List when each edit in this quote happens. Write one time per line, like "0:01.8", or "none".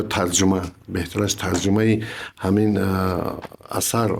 none